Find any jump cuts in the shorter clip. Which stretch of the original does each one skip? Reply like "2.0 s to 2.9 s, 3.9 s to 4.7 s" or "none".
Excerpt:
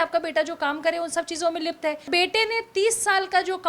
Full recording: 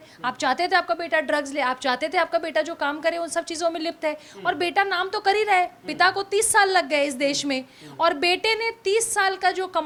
4.3 s to 8.2 s